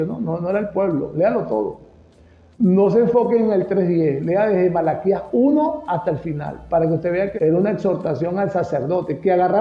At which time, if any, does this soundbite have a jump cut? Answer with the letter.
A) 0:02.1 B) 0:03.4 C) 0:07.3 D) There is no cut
C